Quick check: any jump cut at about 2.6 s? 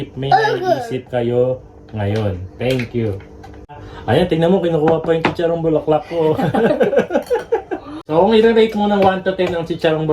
no; 2 cuts; at 3.9 s, 8.0 s

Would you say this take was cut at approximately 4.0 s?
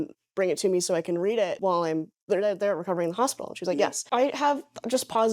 yes; 2 cuts; at 1.6 s, 4.0 s

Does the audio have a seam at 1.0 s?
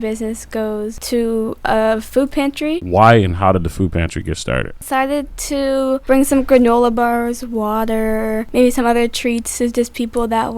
yes; 5 cuts; at 1.0 s, 2.8 s, 4.8 s, 6.0 s, 8.5 s

